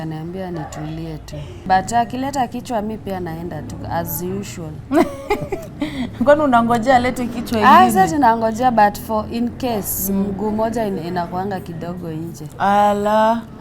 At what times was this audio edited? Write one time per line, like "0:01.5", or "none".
0:01.6